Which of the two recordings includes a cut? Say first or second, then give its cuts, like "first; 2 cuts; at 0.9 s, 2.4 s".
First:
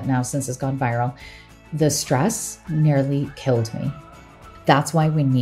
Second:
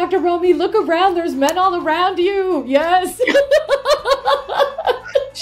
first; 1 cut; at 4.4 s